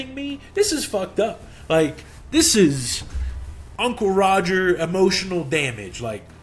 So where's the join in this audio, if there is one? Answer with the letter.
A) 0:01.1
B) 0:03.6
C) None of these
B